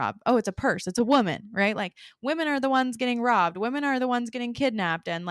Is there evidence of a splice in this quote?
no; 0 cuts

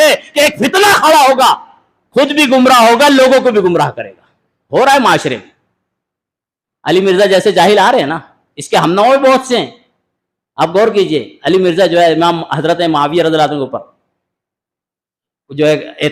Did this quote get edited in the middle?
no; 0 cuts

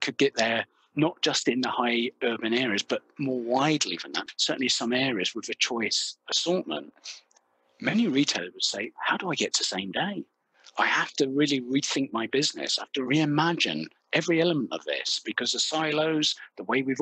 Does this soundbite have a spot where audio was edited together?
yes; 1 cut; at 4.2 s

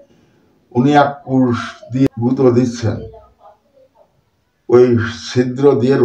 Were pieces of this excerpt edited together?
yes; 1 cut; at 2.1 s

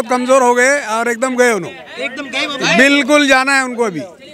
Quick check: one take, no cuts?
yes; 0 cuts

